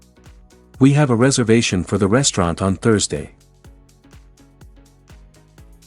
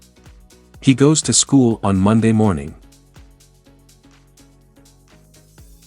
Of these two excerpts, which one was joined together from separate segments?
second; 2 cuts; at 0.8 s, 2.8 s

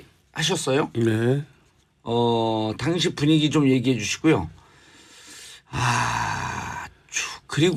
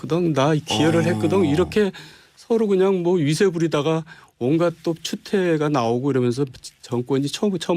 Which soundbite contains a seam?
second; 1 cut; at 5.9 s

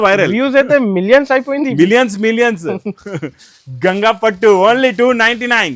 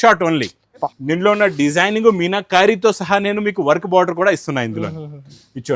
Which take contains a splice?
second; 1 cut; at 0.9 s

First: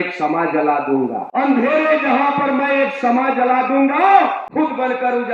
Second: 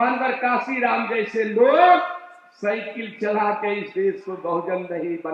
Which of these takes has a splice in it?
first; 2 cuts; at 1.3 s, 4.4 s

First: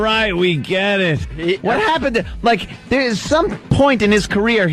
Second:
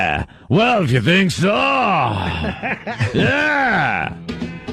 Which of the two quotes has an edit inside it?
first; 1 cut; at 1.4 s

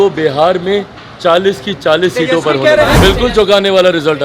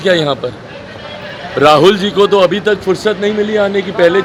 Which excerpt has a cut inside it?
first; 1 cut; at 3.0 s

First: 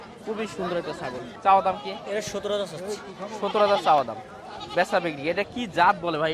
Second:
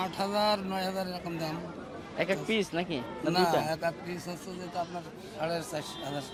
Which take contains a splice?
first; 1 cut; at 1.3 s

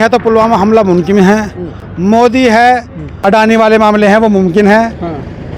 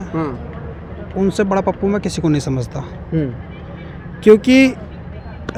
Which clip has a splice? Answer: first; 1 cut; at 3.2 s

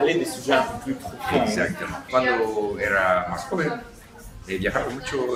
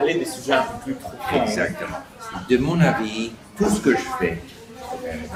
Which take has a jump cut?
first; 1 cut; at 2.0 s

